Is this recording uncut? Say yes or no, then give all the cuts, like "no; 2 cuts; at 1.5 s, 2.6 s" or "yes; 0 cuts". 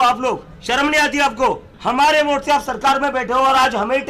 no; 1 cut; at 1.7 s